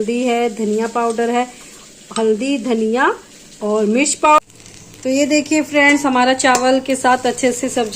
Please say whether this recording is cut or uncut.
cut